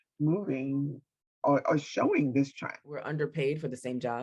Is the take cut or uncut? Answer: cut